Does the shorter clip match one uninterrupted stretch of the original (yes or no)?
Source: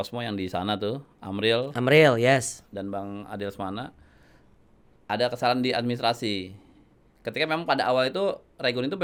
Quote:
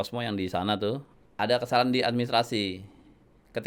no